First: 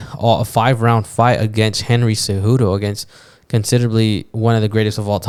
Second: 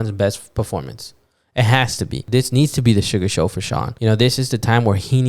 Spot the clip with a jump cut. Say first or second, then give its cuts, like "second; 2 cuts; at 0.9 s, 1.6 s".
second; 2 cuts; at 2.2 s, 3.9 s